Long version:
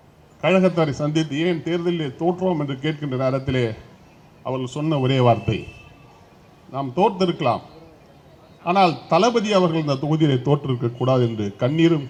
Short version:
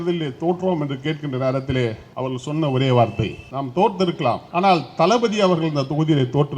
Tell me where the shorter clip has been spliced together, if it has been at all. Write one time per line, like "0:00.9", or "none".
0:02.0
0:03.4
0:04.4